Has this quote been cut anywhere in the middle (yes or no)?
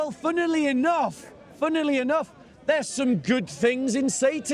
no